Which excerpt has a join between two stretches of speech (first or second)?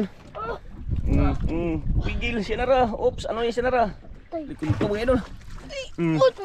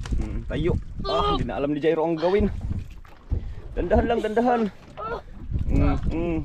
first